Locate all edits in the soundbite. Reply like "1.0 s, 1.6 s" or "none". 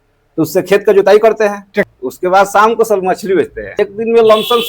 1.9 s, 3.8 s

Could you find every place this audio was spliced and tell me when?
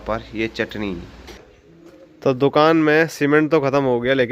1.5 s

